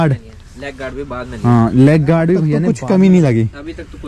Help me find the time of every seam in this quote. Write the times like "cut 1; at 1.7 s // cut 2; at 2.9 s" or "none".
cut 1; at 2.6 s